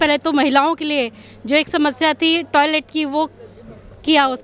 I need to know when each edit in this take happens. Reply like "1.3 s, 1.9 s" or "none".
none